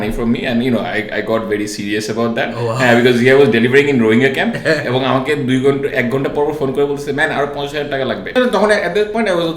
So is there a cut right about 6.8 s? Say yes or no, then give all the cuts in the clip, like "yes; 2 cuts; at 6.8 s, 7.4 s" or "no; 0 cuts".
no; 1 cut; at 8.4 s